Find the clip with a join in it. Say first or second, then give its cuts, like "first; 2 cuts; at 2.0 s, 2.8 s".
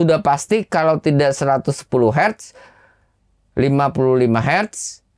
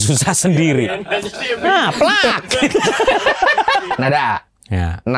second; 1 cut; at 3.9 s